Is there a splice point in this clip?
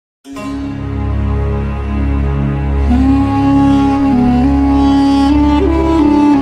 no; 0 cuts

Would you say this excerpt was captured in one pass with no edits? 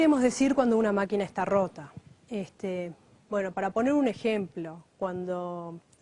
yes; 0 cuts

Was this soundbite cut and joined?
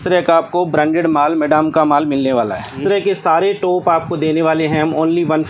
yes; 1 cut; at 2.8 s

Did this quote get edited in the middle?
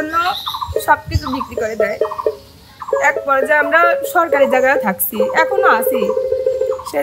no; 0 cuts

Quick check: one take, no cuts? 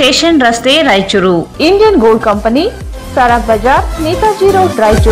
no; 1 cut; at 1.5 s

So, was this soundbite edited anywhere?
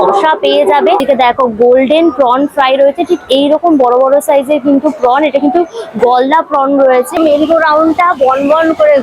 yes; 2 cuts; at 1.0 s, 7.2 s

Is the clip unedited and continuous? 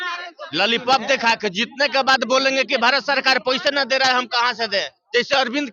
yes; 0 cuts

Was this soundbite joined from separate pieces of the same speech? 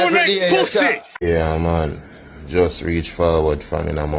yes; 1 cut; at 1.1 s

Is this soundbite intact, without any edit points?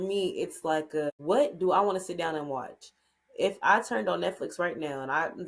no; 1 cut; at 1.2 s

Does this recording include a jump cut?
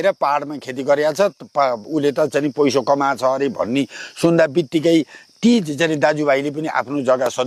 no; 0 cuts

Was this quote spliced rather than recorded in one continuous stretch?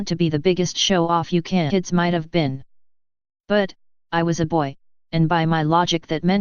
no; 0 cuts

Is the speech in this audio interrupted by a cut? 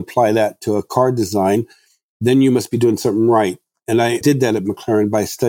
yes; 1 cut; at 3.9 s

